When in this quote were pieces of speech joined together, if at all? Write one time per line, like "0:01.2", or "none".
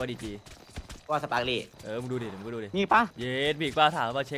0:01.8
0:03.2